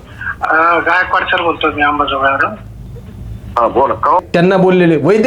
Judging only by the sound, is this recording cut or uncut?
cut